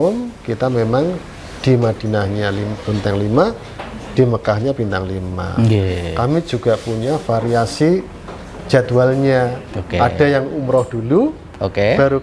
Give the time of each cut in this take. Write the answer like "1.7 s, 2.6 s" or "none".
none